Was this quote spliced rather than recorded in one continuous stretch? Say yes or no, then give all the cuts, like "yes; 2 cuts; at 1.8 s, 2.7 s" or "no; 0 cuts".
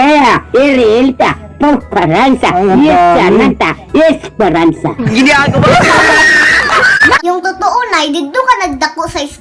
no; 0 cuts